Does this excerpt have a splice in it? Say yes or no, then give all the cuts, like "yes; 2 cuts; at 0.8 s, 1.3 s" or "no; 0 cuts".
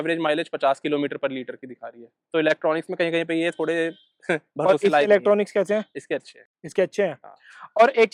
no; 0 cuts